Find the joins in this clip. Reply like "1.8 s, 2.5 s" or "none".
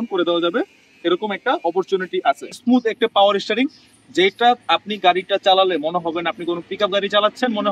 2.5 s